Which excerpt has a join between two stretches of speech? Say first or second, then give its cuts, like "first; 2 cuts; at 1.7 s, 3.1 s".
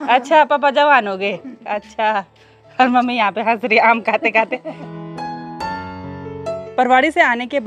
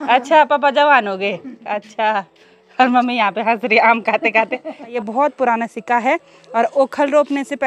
second; 1 cut; at 4.9 s